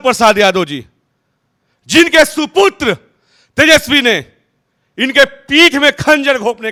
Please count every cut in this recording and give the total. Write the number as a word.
zero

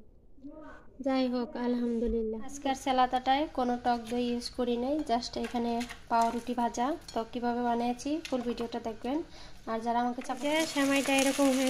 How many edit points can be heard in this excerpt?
two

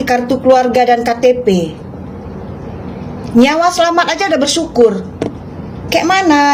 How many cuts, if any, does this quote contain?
zero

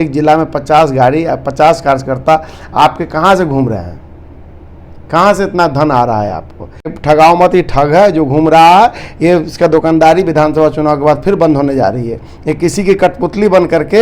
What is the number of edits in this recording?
one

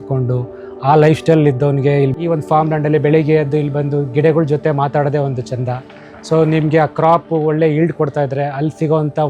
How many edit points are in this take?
zero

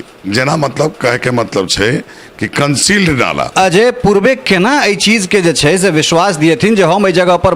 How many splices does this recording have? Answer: one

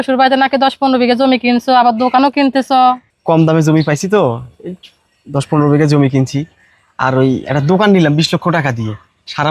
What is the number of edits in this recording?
one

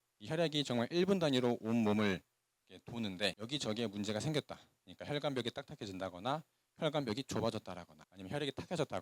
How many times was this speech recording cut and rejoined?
zero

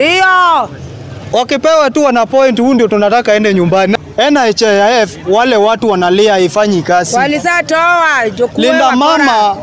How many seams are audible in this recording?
one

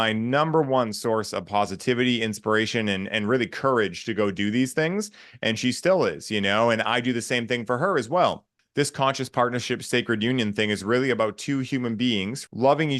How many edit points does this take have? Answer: one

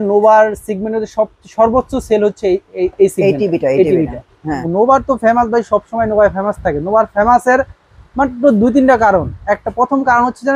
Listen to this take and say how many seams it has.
one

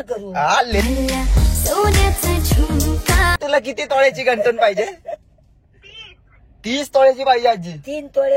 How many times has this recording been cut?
one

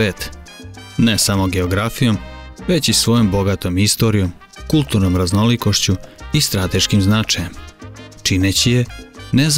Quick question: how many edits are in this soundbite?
zero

